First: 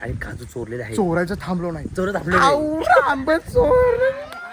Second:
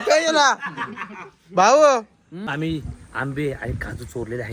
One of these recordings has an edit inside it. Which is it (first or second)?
second